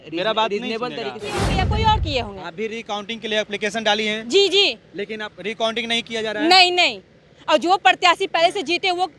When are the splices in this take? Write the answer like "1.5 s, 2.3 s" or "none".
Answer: 1.4 s